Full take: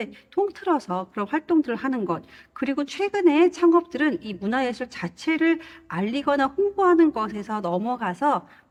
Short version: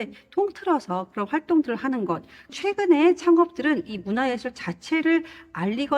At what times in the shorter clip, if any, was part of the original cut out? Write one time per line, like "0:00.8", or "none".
0:02.5